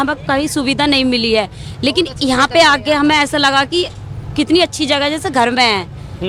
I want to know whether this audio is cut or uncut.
uncut